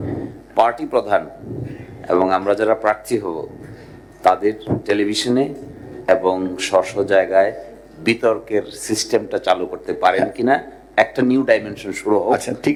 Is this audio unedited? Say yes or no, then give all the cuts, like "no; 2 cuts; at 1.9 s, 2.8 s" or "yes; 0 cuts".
yes; 0 cuts